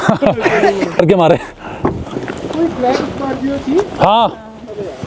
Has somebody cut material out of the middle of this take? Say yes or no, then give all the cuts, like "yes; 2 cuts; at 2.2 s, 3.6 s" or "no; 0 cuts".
no; 0 cuts